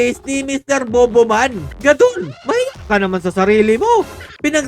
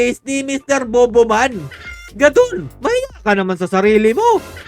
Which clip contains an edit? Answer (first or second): first